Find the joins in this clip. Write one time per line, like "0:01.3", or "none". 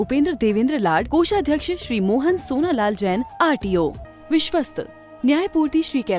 0:04.1